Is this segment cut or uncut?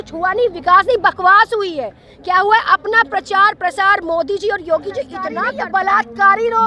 cut